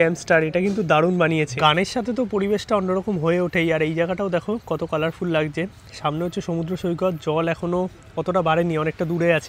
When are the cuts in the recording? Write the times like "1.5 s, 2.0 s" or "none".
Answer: 1.6 s